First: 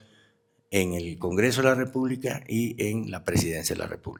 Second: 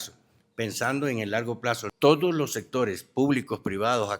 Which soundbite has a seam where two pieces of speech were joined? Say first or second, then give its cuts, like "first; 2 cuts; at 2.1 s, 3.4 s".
second; 1 cut; at 1.9 s